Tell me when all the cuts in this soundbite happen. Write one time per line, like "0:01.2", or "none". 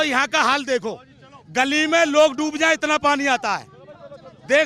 none